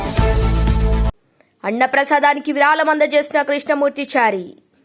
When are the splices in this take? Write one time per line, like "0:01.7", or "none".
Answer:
none